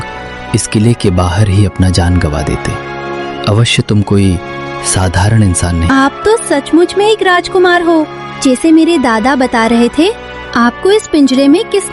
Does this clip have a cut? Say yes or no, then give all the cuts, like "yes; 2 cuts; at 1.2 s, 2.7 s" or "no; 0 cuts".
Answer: yes; 1 cut; at 5.9 s